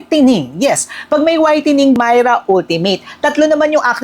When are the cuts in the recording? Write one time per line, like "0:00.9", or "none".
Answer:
0:02.0